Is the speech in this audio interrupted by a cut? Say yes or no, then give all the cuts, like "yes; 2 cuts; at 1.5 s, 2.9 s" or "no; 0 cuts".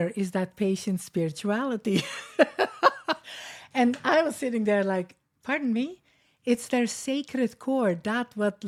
no; 0 cuts